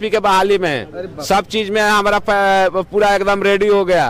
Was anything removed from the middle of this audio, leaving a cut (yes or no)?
no